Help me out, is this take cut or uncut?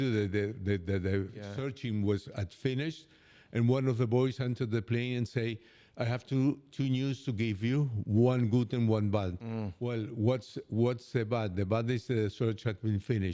uncut